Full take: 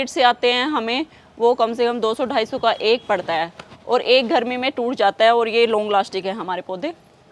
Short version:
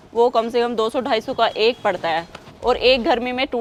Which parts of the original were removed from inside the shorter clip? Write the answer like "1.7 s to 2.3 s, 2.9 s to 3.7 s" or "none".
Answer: none